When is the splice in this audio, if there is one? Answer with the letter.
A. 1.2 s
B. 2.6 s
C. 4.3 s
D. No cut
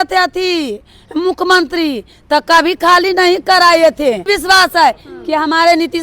C